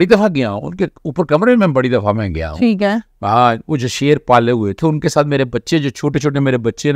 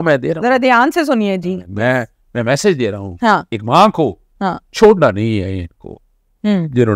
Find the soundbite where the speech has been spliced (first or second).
second